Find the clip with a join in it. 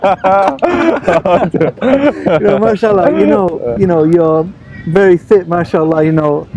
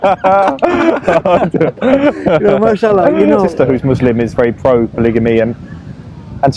second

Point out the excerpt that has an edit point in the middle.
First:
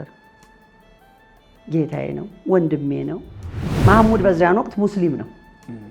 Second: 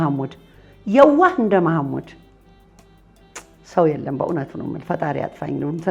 first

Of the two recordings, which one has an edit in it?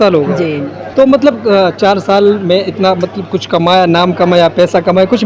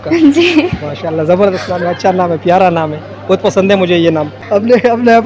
second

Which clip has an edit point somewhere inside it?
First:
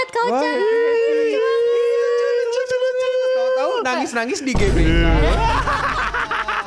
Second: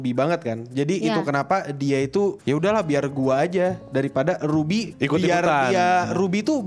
second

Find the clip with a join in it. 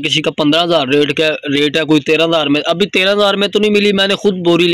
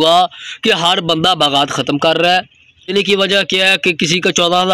second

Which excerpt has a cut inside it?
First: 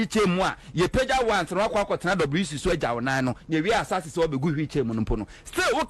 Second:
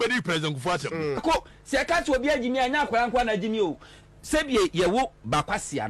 second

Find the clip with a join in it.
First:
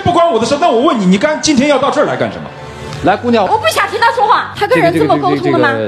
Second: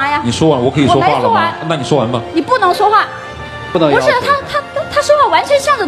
second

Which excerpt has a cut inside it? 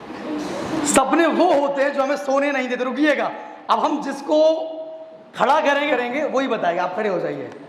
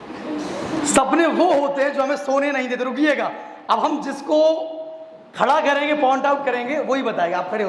first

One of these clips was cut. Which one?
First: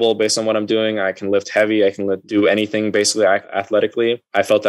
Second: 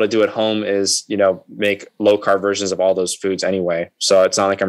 first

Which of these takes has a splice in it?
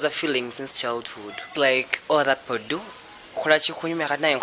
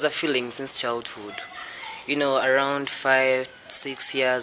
first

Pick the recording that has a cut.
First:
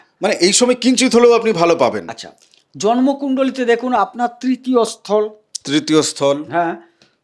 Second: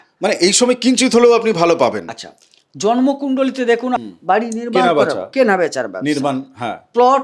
second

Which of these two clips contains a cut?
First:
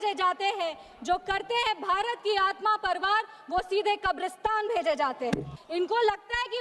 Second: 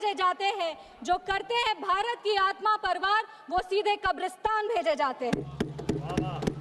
first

